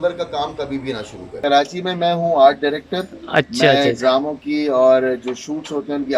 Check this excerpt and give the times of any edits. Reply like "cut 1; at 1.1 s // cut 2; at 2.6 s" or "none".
cut 1; at 1.4 s